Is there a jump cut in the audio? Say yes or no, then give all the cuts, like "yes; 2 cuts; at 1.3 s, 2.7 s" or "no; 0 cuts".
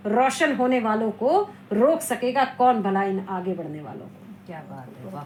no; 0 cuts